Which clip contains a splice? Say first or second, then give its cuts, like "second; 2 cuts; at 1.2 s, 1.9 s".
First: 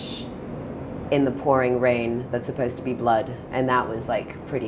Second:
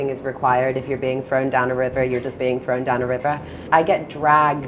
second; 1 cut; at 3.6 s